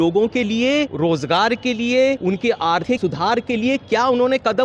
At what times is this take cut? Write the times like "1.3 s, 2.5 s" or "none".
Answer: 0.9 s, 2.6 s